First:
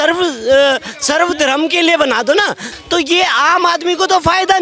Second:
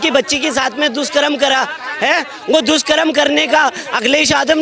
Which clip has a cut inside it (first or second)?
first